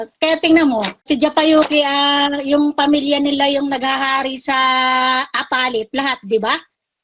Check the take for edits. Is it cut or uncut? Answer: cut